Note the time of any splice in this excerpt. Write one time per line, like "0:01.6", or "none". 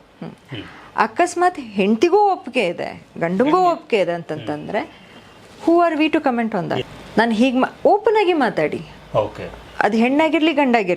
0:06.8